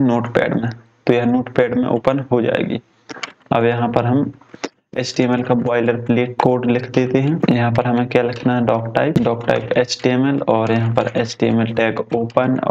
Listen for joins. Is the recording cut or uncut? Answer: cut